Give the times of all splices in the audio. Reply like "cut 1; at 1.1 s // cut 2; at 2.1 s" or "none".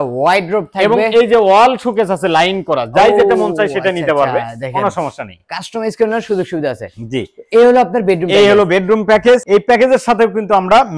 none